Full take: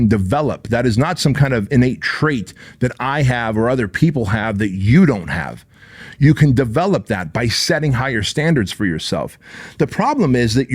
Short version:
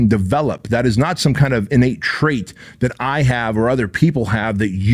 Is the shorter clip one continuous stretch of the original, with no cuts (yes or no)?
yes